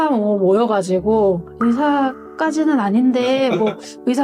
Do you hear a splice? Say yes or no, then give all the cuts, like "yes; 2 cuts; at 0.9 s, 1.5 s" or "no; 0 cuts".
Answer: no; 0 cuts